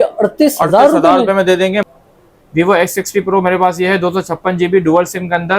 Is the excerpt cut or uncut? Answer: cut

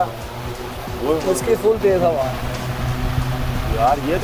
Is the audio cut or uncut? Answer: uncut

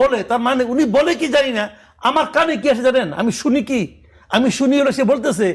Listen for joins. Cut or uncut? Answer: uncut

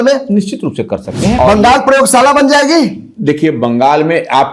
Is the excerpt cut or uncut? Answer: cut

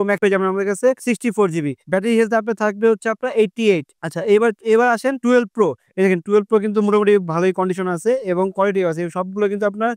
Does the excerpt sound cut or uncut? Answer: uncut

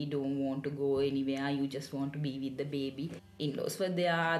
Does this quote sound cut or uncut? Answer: cut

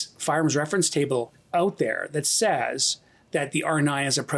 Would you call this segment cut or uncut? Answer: cut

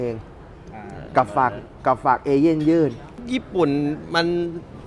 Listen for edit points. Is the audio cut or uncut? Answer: cut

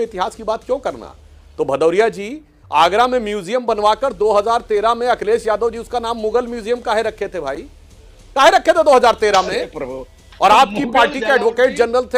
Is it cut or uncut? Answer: uncut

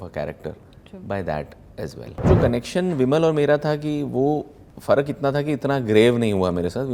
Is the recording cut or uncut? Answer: cut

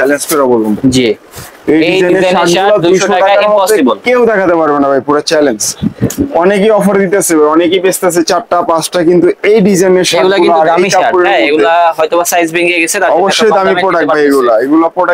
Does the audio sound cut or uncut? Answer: uncut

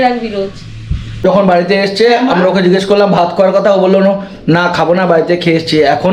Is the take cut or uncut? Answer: cut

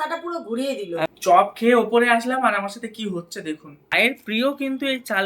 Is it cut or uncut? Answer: cut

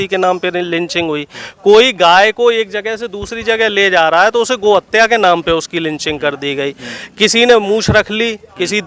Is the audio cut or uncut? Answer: uncut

